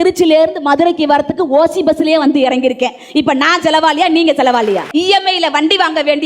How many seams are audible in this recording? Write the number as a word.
one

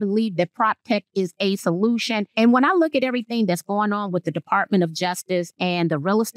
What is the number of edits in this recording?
one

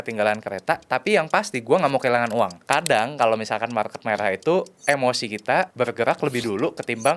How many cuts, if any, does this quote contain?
two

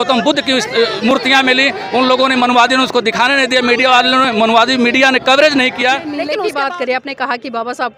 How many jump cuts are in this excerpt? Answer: one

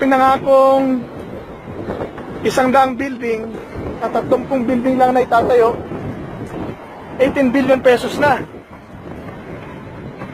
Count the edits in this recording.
one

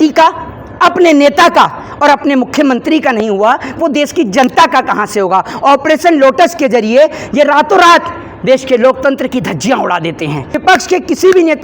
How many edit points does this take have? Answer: two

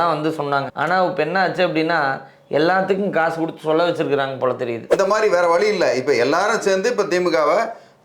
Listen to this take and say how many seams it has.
one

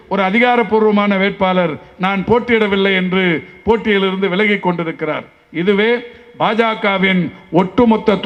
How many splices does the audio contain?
zero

